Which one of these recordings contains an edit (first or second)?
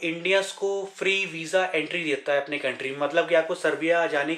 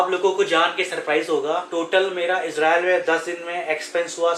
second